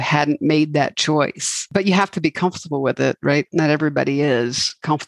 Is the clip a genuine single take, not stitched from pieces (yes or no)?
no